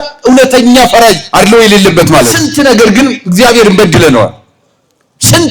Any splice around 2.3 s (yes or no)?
yes